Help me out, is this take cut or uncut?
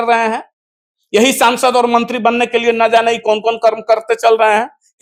uncut